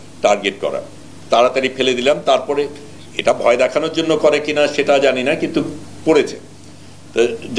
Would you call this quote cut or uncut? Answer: uncut